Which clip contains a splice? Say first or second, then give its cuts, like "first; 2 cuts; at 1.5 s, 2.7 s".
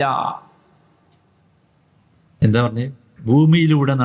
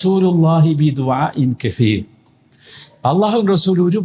first; 2 cuts; at 2.4 s, 3.1 s